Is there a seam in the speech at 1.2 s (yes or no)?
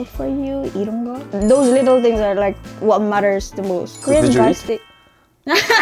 yes